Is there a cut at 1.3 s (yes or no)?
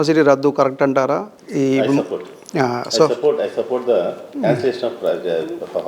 no